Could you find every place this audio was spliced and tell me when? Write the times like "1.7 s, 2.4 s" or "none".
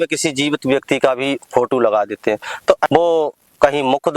2.8 s